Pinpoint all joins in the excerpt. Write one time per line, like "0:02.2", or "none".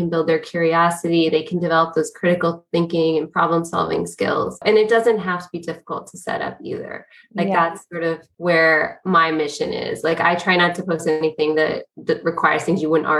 0:04.6
0:08.3